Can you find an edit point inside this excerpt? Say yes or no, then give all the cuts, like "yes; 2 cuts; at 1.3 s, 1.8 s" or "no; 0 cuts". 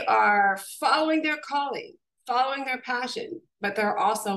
no; 0 cuts